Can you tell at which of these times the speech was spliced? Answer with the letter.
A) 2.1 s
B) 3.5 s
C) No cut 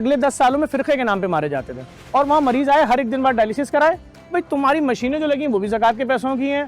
A